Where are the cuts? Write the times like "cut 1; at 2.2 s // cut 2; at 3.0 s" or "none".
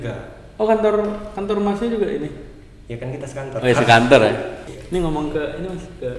cut 1; at 4.5 s